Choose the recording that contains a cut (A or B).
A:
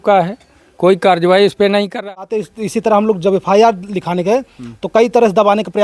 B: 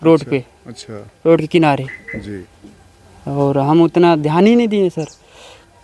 A